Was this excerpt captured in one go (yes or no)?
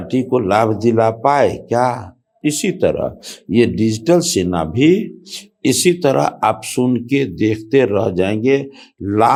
yes